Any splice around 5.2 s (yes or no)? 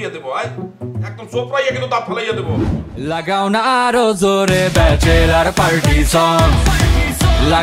no